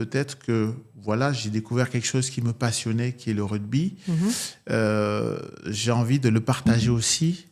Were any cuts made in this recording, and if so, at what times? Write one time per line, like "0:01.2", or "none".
none